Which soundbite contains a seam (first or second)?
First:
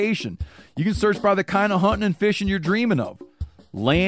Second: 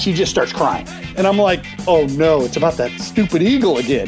second